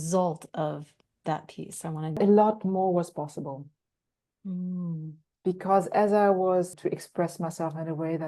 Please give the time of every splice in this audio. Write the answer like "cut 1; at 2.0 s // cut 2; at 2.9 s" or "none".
cut 1; at 2.1 s // cut 2; at 6.7 s

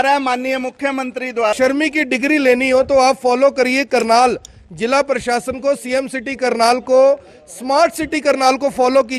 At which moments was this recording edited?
cut 1; at 1.5 s

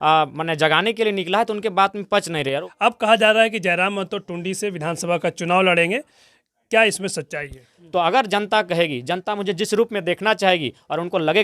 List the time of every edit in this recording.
cut 1; at 2.7 s // cut 2; at 7.7 s

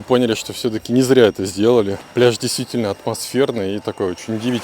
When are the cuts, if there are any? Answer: cut 1; at 2.0 s

